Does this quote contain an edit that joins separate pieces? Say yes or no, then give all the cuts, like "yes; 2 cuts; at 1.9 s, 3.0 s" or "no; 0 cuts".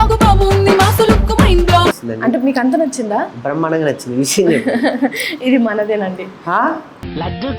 yes; 1 cut; at 2.1 s